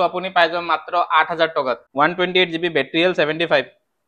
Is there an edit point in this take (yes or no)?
yes